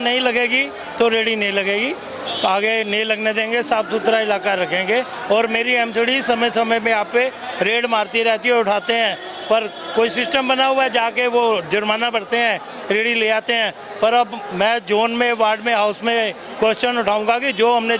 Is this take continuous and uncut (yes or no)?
yes